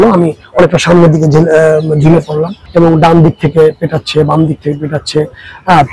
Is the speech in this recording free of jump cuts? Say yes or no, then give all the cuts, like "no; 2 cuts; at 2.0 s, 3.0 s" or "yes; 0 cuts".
no; 1 cut; at 2.6 s